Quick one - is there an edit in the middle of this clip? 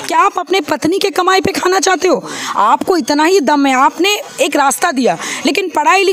no; 0 cuts

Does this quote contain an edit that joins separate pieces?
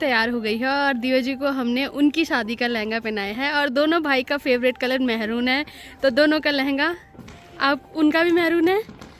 no; 0 cuts

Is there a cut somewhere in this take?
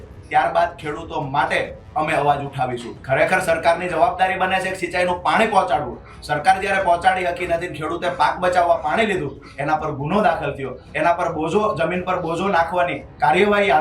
yes; 1 cut; at 2.9 s

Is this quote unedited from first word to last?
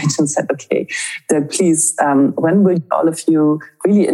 no; 1 cut; at 2.8 s

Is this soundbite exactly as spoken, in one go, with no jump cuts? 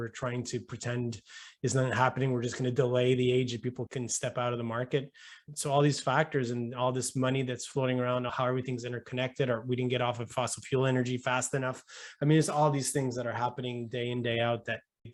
yes; 0 cuts

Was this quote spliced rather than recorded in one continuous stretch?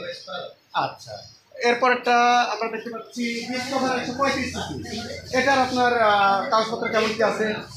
no; 0 cuts

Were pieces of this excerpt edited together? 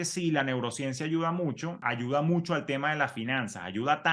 yes; 1 cut; at 1.8 s

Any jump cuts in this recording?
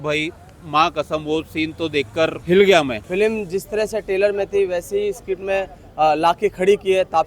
yes; 2 cuts; at 2.4 s, 3.0 s

